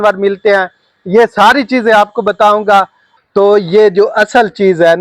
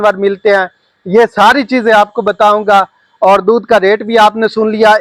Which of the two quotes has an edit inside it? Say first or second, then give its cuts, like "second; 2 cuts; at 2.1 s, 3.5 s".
first; 1 cut; at 3.0 s